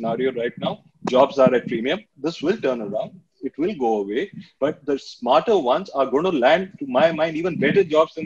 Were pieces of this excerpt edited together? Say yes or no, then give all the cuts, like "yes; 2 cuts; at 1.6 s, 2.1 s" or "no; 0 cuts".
yes; 1 cut; at 2.1 s